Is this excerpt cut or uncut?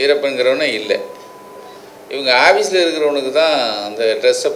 uncut